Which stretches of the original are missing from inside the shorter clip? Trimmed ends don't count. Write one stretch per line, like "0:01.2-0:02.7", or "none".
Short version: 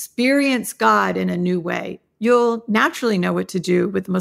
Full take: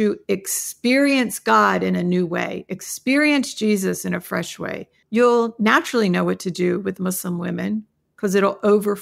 0:02.7-0:04.9